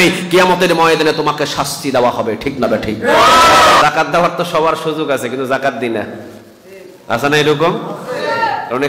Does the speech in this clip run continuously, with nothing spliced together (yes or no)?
no